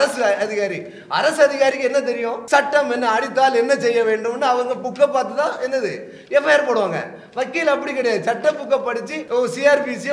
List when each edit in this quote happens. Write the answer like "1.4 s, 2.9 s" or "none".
2.3 s, 9.1 s